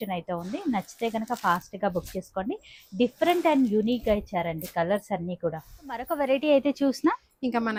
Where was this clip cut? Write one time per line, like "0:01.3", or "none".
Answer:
none